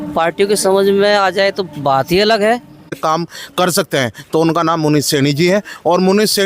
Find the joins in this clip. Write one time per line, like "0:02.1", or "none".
0:02.9